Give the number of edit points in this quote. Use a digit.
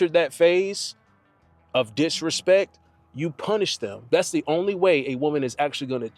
1